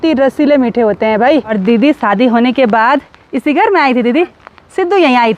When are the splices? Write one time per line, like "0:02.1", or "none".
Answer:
0:01.5